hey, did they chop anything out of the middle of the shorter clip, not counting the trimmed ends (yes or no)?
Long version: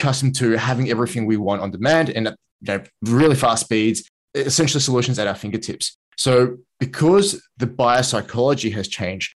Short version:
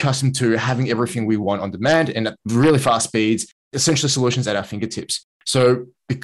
yes